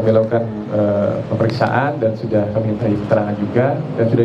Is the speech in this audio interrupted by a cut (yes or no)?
no